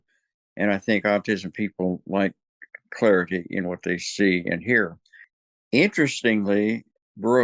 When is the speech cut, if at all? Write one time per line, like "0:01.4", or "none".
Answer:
0:01.2